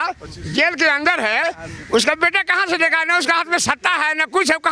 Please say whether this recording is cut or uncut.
uncut